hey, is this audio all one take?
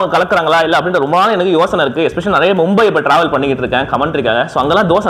yes; 0 cuts

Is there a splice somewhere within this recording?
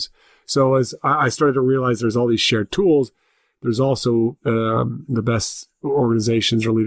no; 0 cuts

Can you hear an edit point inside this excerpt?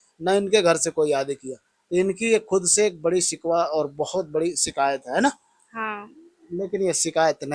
no; 0 cuts

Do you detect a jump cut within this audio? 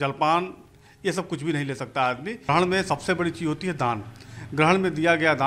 yes; 1 cut; at 2.4 s

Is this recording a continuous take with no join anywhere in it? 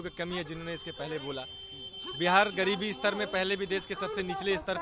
yes; 0 cuts

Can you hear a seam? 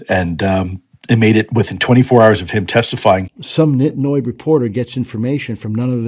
yes; 1 cut; at 3.4 s

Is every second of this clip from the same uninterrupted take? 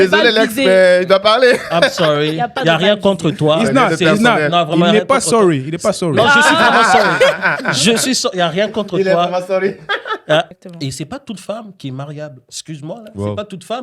no; 1 cut; at 10.6 s

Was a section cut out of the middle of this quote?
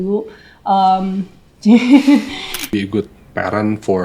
yes; 1 cut; at 2.7 s

